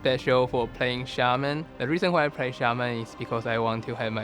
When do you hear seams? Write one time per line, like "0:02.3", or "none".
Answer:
0:01.7

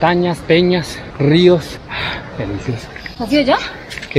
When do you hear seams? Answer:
0:01.0
0:01.8

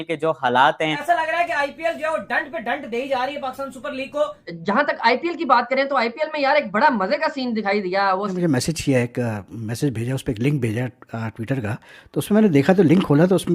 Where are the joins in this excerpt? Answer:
0:01.0
0:04.5
0:08.3

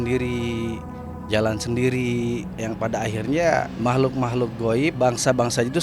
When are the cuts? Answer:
0:02.5
0:03.7
0:04.9

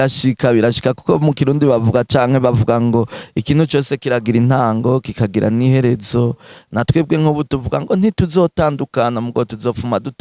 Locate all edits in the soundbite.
0:06.5

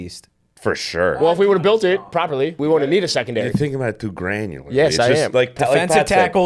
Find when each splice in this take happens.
0:01.1
0:02.6

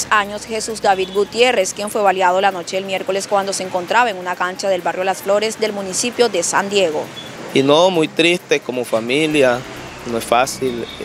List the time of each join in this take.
0:07.1

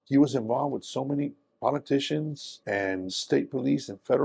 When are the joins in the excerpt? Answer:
none

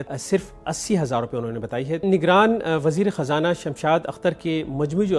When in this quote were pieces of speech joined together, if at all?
0:02.0

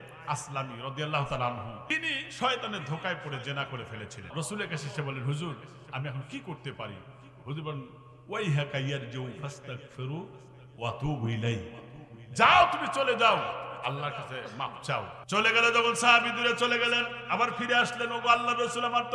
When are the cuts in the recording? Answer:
0:01.8
0:04.3
0:15.2

